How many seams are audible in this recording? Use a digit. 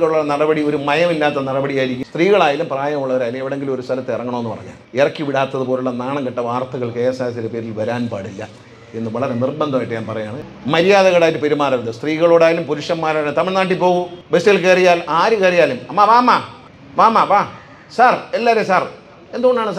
2